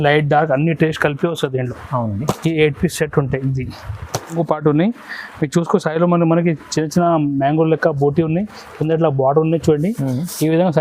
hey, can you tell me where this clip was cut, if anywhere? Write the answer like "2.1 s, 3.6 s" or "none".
4.3 s